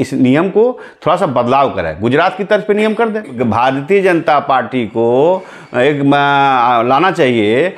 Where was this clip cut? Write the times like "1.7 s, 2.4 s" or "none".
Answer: 3.4 s